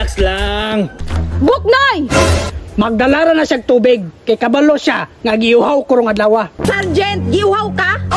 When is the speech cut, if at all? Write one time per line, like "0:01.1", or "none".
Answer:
0:01.0
0:02.4
0:06.6